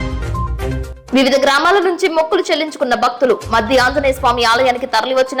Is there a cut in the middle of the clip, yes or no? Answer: yes